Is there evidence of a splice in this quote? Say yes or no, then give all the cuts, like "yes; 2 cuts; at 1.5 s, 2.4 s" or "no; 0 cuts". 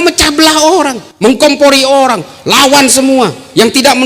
yes; 1 cut; at 1.0 s